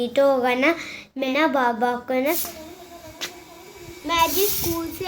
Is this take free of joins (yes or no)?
no